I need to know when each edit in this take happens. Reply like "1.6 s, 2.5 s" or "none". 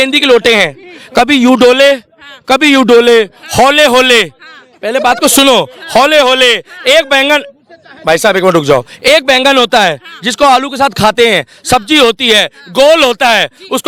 none